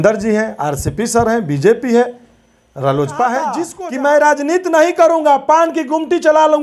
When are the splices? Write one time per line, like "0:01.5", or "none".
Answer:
0:03.7